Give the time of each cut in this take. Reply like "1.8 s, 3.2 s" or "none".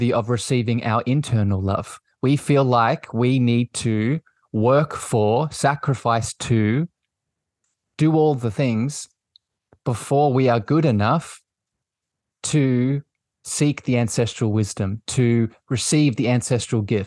none